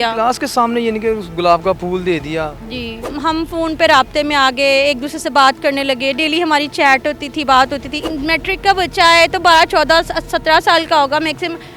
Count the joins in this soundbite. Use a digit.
2